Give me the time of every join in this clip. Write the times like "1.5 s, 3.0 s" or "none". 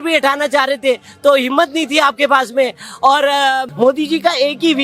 3.7 s